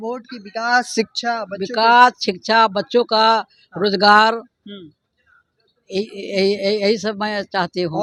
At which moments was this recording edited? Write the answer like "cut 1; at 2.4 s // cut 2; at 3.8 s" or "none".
none